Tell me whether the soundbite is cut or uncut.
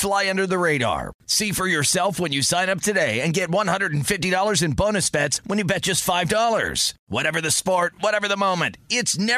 uncut